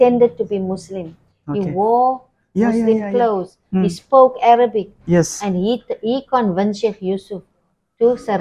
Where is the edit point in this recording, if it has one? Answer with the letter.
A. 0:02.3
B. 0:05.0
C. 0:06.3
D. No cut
D